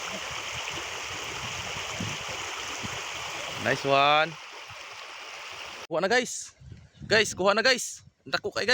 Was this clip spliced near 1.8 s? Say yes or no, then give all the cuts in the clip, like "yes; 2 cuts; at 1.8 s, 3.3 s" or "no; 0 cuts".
no; 1 cut; at 5.9 s